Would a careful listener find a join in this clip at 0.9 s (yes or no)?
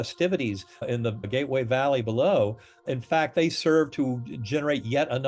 yes